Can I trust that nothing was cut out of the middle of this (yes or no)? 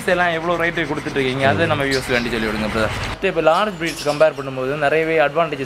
no